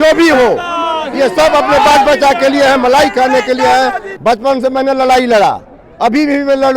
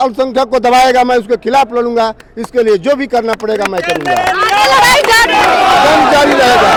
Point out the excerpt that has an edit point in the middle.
first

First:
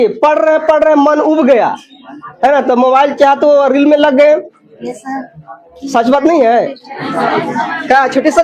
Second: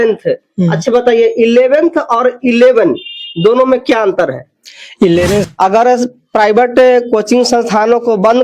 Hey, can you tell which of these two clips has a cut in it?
second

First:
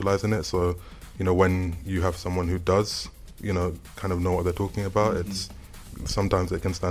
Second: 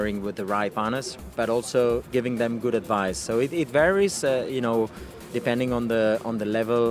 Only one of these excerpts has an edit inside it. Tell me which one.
second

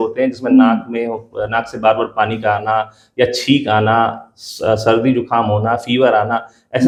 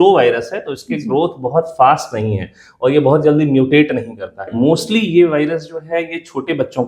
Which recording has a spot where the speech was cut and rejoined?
second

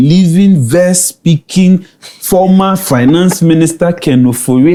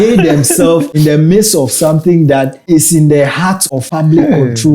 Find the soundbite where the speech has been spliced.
second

